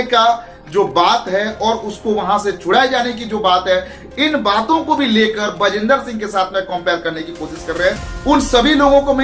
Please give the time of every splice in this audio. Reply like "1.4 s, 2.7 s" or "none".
8.1 s